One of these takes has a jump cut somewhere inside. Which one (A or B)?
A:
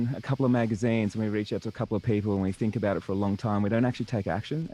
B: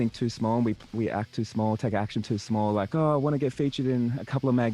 B